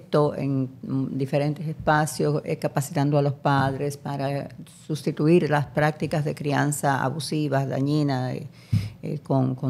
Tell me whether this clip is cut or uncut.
uncut